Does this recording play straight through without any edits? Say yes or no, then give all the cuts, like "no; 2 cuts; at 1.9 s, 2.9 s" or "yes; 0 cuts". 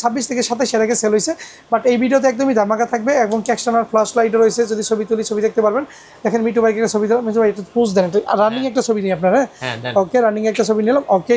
yes; 0 cuts